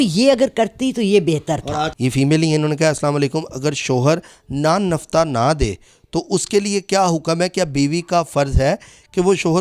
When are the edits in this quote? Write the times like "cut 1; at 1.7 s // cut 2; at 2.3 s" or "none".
cut 1; at 1.9 s